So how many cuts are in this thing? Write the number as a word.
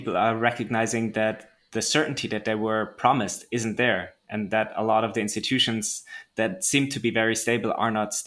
zero